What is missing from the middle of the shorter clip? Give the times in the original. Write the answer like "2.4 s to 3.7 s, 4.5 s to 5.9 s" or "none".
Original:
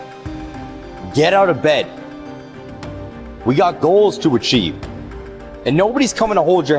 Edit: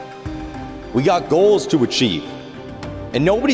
0.9 s to 3.4 s